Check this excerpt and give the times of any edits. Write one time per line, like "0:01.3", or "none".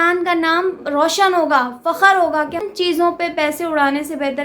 0:02.6